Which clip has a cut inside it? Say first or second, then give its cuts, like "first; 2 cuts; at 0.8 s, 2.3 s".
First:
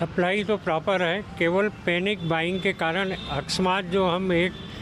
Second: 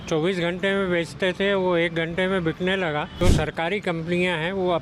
second; 1 cut; at 3.2 s